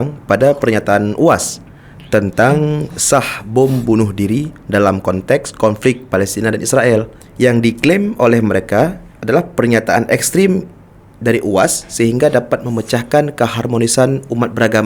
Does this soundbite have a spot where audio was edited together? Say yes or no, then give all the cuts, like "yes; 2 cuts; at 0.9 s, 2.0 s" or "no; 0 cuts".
yes; 2 cuts; at 7.2 s, 9.1 s